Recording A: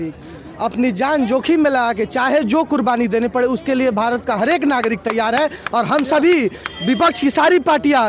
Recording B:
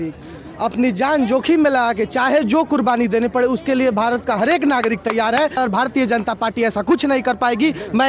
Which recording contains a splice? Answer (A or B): B